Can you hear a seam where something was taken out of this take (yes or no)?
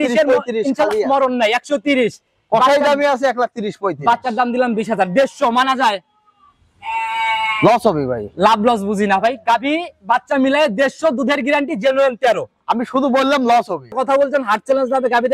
yes